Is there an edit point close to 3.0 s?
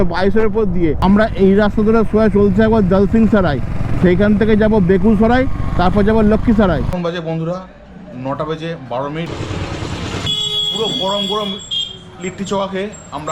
no; 4 cuts; at 1.0 s, 6.9 s, 9.3 s, 10.3 s

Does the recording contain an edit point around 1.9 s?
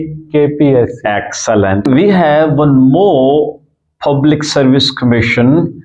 yes; 1 cut; at 1.9 s

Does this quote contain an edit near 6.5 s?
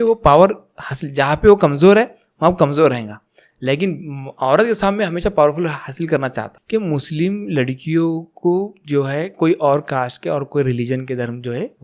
yes; 1 cut; at 6.5 s

